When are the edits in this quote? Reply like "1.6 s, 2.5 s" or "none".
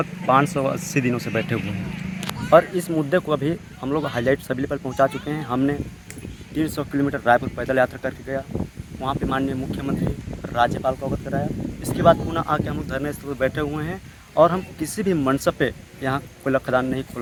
none